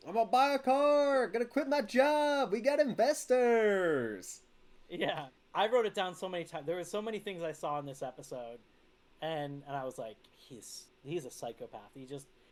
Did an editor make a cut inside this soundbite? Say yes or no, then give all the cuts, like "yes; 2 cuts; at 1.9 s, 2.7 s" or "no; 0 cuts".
no; 0 cuts